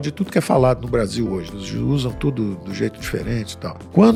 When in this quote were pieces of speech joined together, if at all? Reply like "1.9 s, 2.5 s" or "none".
none